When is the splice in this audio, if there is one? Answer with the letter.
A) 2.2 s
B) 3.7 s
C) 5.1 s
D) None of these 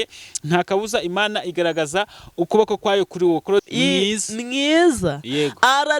B